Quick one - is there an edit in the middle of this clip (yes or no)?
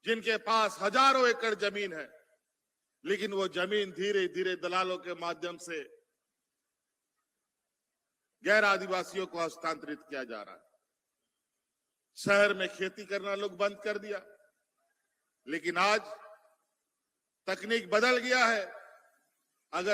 no